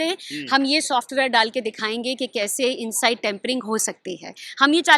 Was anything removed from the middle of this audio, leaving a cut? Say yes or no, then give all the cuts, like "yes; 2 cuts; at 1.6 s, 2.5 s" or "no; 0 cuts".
no; 0 cuts